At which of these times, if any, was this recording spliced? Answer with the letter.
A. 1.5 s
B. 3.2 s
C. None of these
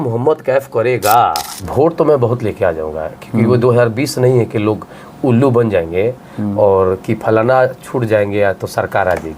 A